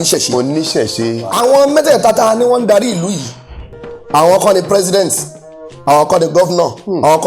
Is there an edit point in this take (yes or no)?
yes